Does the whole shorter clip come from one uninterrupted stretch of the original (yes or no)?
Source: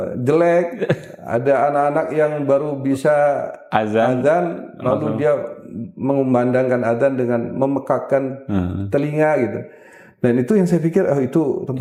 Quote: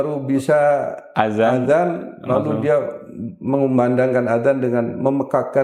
yes